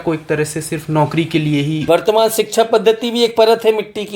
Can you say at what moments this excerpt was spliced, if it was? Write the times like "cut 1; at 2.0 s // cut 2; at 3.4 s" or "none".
cut 1; at 1.8 s